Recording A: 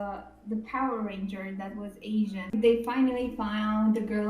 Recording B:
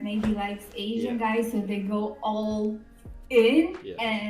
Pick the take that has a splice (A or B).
A